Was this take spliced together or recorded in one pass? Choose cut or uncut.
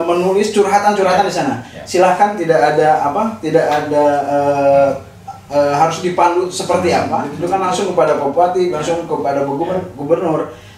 cut